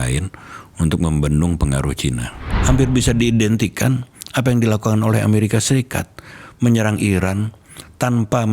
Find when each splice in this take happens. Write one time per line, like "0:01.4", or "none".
0:02.5